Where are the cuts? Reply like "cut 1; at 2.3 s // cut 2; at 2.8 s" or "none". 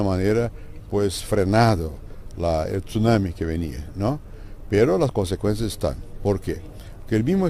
cut 1; at 4.4 s